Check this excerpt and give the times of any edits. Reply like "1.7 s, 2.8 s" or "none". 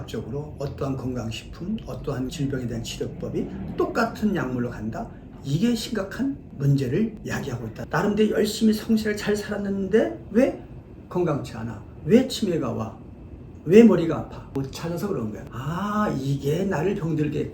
7.7 s, 14.4 s, 15.4 s